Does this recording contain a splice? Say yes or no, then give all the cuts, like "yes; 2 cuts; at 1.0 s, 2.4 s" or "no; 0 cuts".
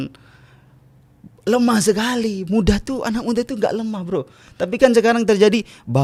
no; 0 cuts